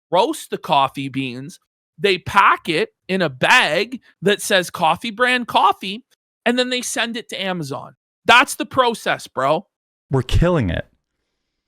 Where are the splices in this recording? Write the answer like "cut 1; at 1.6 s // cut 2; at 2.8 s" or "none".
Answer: cut 1; at 10.0 s